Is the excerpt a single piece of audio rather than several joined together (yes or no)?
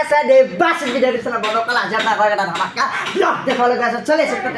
yes